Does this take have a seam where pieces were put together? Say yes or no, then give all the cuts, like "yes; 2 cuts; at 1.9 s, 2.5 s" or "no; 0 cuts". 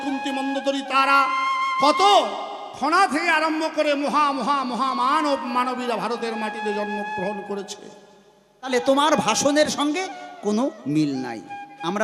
yes; 1 cut; at 8.7 s